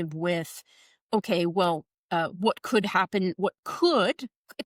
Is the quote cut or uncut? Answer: uncut